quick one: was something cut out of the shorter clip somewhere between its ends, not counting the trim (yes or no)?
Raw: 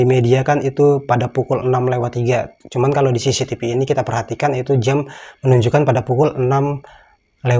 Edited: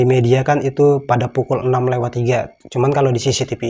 no